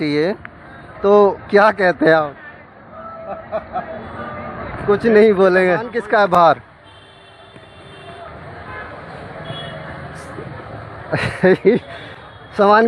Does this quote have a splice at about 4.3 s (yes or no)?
no